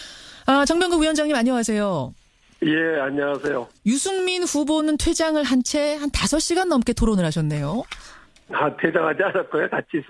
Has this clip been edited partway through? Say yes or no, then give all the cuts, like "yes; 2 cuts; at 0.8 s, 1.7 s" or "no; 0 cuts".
yes; 1 cut; at 7.7 s